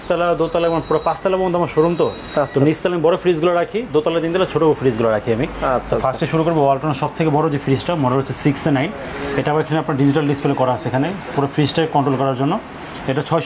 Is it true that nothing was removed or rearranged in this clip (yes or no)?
yes